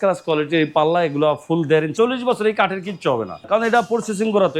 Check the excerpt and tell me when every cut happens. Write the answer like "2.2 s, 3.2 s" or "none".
1.9 s, 3.4 s